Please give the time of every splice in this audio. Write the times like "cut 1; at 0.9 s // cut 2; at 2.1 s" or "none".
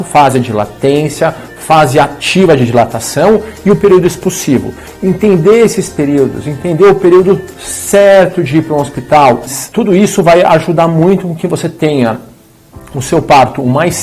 cut 1; at 9.6 s